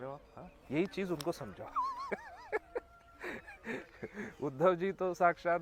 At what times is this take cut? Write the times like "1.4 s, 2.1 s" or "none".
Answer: none